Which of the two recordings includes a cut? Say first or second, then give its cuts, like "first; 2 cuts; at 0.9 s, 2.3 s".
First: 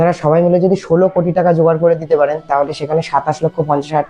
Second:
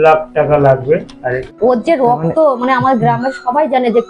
second; 1 cut; at 1.4 s